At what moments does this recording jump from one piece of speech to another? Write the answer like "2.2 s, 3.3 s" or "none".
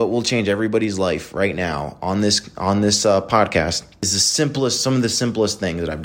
4.2 s